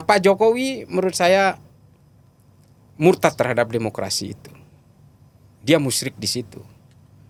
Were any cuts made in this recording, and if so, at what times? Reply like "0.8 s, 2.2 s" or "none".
none